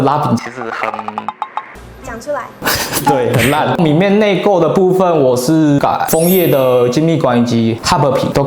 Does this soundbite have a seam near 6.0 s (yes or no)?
no